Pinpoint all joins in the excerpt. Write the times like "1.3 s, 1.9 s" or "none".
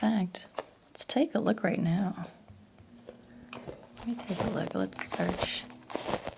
none